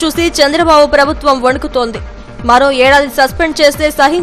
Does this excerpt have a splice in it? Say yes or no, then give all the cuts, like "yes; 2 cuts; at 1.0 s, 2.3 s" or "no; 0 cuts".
no; 0 cuts